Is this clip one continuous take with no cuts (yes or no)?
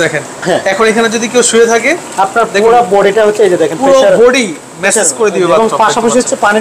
yes